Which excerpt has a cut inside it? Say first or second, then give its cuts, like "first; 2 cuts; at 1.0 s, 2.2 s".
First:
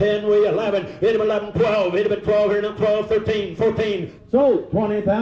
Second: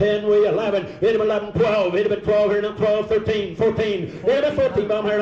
first; 1 cut; at 4.1 s